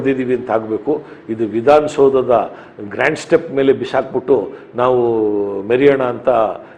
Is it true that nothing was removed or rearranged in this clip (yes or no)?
yes